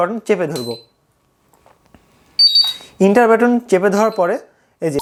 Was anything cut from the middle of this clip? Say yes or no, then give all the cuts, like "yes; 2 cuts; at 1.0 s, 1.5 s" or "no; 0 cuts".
no; 0 cuts